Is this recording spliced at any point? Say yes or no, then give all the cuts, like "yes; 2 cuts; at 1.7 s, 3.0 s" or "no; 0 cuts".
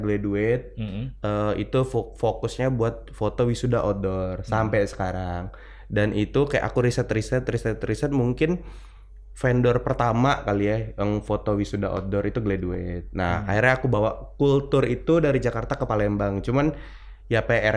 no; 0 cuts